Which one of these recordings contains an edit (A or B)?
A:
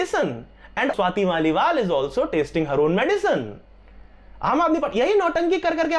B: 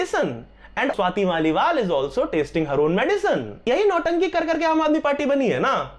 B